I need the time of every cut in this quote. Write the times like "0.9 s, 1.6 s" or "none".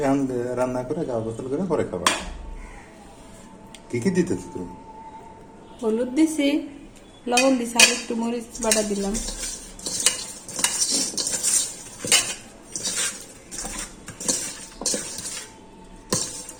none